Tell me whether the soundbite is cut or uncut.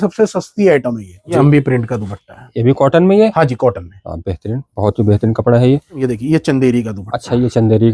cut